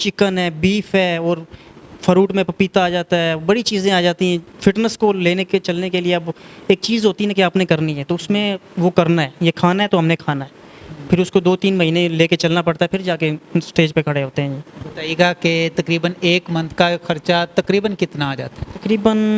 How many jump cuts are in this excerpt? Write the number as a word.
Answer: zero